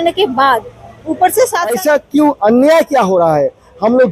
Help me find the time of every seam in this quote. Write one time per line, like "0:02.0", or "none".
0:01.7